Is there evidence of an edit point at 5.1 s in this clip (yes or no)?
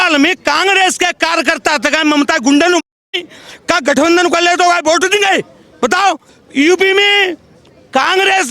no